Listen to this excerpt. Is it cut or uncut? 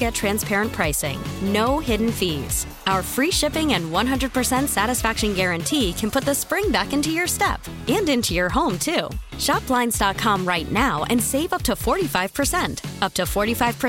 uncut